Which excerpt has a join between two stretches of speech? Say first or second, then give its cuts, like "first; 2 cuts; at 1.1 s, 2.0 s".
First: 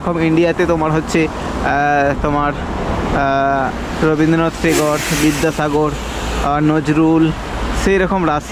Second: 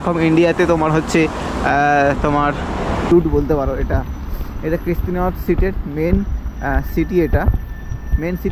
second; 1 cut; at 3.1 s